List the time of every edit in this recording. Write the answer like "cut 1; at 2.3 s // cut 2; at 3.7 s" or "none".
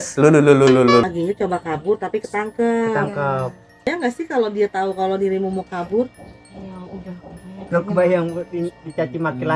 cut 1; at 1.0 s